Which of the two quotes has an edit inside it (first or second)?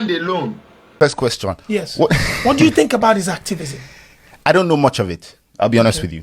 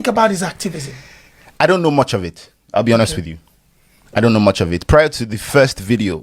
first